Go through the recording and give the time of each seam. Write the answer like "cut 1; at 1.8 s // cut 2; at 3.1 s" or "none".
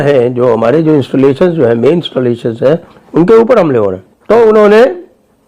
cut 1; at 4.1 s